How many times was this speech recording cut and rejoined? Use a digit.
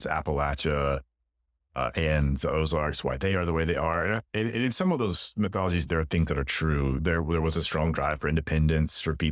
1